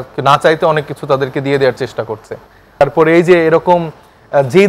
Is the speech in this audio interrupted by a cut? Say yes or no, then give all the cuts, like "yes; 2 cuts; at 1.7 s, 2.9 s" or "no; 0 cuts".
yes; 1 cut; at 2.8 s